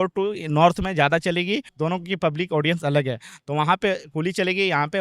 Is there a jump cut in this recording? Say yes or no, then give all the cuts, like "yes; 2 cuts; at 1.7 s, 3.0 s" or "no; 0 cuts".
yes; 1 cut; at 1.7 s